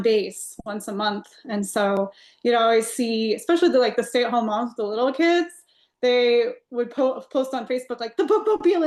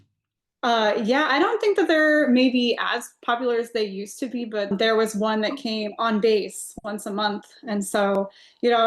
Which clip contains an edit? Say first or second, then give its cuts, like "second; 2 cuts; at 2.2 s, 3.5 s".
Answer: second; 1 cut; at 4.7 s